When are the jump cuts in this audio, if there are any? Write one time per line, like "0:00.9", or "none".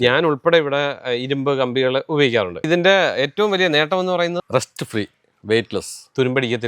0:02.7
0:04.4